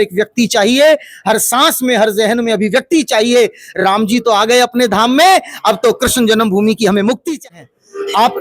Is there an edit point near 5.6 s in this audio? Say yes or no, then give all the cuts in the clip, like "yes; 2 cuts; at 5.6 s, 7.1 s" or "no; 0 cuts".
no; 1 cut; at 7.5 s